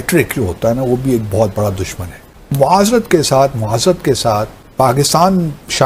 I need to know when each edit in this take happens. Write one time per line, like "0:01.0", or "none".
0:02.2
0:04.6